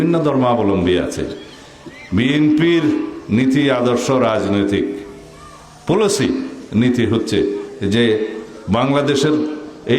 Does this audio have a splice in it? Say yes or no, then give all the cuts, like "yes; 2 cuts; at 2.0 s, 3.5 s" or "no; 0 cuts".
no; 0 cuts